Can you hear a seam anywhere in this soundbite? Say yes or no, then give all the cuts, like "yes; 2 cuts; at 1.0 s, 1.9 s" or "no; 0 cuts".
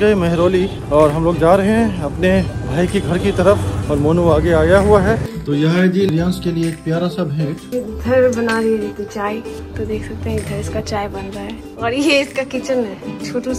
yes; 4 cuts; at 5.3 s, 7.6 s, 9.6 s, 11.6 s